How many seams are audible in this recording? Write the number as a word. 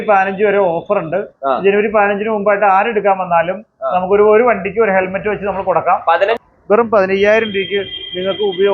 one